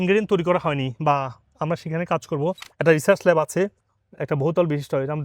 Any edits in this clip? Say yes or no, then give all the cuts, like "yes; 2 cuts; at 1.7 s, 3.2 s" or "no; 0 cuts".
yes; 1 cut; at 2.7 s